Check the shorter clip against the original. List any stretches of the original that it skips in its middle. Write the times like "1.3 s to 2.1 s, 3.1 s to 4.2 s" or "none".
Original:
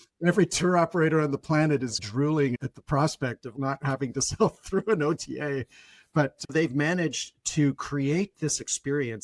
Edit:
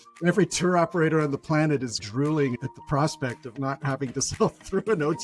none

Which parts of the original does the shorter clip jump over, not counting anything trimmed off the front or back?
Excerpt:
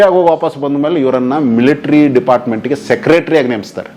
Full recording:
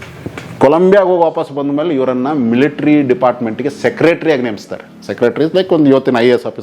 none

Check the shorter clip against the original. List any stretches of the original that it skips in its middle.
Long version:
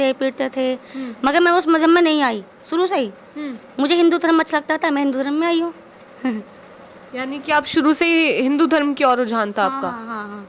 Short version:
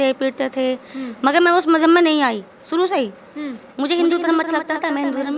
none

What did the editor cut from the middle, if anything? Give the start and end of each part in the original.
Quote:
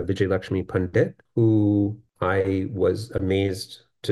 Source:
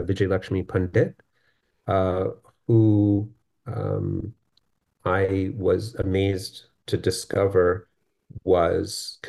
1.2 s to 2.5 s, 3.4 s to 4.9 s

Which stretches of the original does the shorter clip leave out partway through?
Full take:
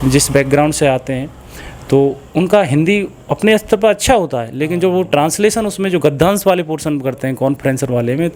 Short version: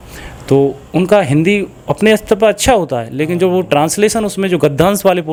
none

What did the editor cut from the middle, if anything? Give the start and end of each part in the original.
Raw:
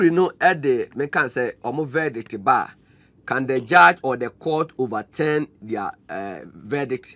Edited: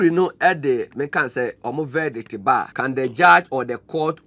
2.7 s to 3.2 s

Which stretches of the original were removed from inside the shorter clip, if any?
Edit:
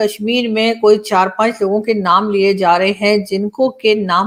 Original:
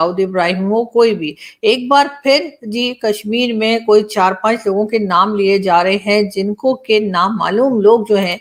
none

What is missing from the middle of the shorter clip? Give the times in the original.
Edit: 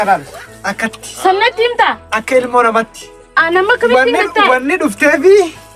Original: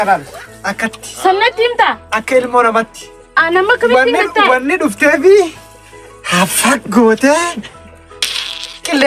none

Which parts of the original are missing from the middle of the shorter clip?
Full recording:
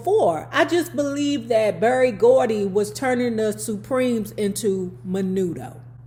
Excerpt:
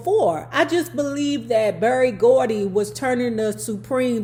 none

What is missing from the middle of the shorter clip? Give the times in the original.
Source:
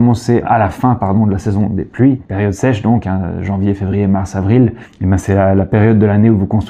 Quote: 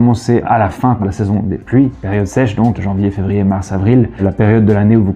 1.0 s to 1.3 s, 3.1 s to 3.4 s, 4.8 s to 5.5 s

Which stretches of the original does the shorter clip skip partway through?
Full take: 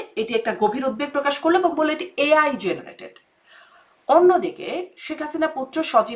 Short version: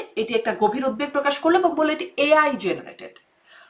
none

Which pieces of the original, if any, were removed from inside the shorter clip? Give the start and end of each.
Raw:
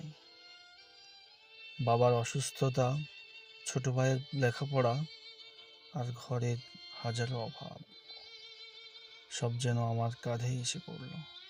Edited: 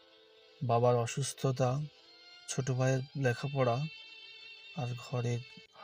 none

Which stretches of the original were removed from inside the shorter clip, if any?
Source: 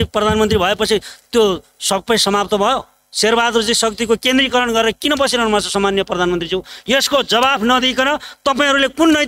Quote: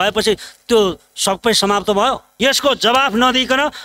2.9 s to 6.7 s

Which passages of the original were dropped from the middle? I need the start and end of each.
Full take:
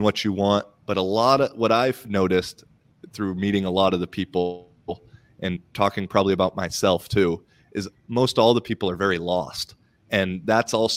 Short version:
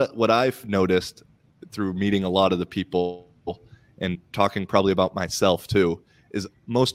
none

